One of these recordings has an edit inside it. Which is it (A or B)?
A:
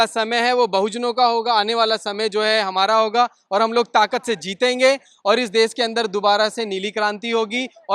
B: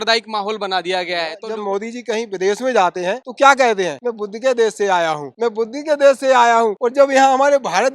B